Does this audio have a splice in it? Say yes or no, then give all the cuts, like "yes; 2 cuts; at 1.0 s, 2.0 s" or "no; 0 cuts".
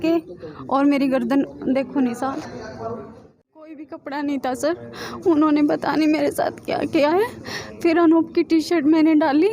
yes; 1 cut; at 3.8 s